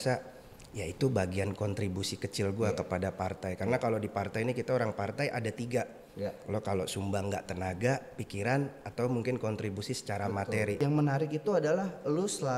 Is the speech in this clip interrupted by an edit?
yes; 1 cut; at 10.8 s

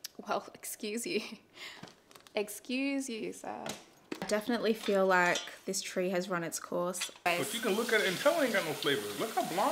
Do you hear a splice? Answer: yes; 2 cuts; at 4.1 s, 7.1 s

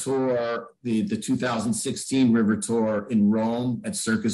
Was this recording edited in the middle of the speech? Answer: no; 0 cuts

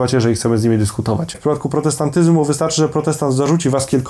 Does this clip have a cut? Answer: yes; 1 cut; at 1.4 s

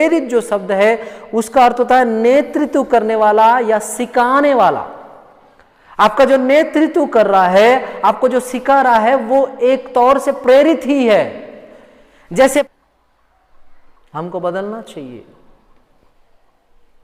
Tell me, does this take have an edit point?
yes; 1 cut; at 12.7 s

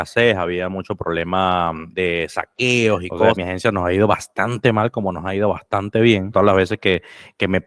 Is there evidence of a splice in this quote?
yes; 3 cuts; at 1.8 s, 3.4 s, 6.3 s

